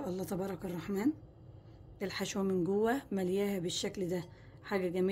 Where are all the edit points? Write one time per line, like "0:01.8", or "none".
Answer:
none